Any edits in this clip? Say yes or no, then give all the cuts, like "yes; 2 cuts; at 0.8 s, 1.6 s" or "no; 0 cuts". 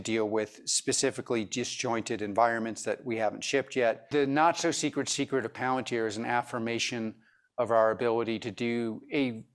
yes; 1 cut; at 4.0 s